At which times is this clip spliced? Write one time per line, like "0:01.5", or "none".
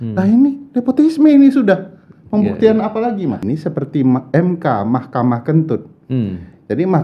0:03.4